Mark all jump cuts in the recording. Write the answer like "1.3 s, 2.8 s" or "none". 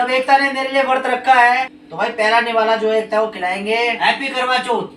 1.8 s, 4.0 s